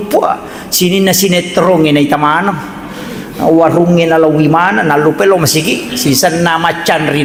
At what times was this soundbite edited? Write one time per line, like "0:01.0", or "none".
none